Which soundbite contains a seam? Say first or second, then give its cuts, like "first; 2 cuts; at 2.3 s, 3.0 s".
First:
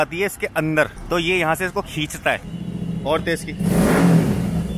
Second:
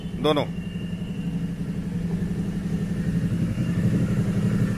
first; 2 cuts; at 1.0 s, 2.5 s